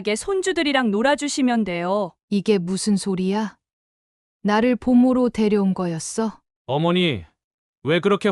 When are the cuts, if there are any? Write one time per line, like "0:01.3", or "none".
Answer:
0:02.2
0:06.5